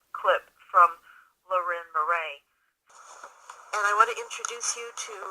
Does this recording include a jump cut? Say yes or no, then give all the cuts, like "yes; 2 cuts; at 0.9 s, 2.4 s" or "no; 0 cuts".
yes; 1 cut; at 2.8 s